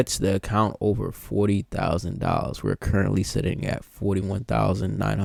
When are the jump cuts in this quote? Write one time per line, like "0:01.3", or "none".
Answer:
none